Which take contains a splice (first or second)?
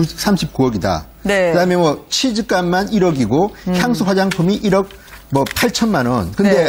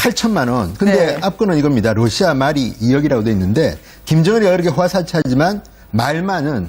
second